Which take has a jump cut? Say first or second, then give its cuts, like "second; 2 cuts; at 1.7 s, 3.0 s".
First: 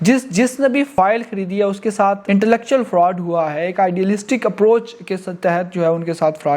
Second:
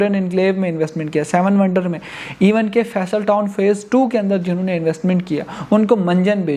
first; 2 cuts; at 0.9 s, 2.2 s